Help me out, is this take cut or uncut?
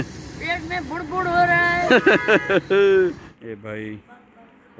cut